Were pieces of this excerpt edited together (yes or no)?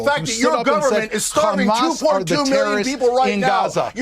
yes